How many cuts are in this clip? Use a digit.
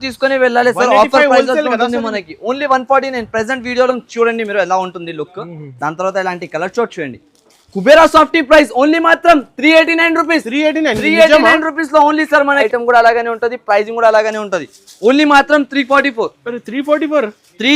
2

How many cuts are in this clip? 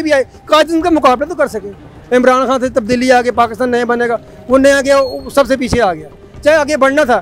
1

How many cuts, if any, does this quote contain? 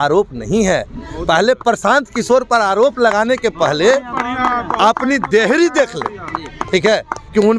0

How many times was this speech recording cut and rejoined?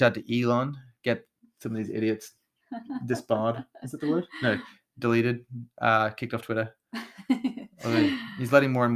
0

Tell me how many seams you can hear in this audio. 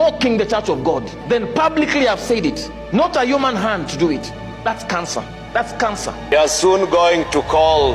1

